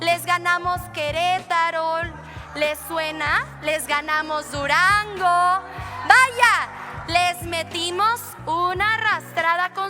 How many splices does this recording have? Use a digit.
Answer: 0